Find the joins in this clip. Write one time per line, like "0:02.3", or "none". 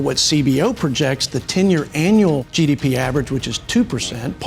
0:02.5